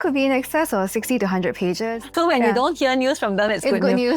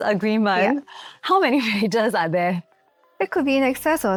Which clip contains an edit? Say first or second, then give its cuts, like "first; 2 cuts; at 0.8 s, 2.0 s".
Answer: first; 1 cut; at 2.1 s